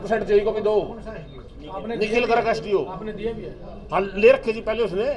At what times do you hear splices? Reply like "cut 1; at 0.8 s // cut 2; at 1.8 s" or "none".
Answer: none